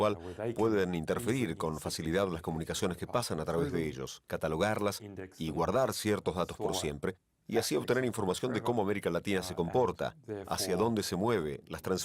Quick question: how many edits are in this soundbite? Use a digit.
1